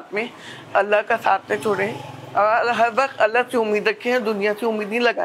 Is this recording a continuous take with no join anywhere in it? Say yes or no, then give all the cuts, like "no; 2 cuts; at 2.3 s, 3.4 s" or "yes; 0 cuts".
yes; 0 cuts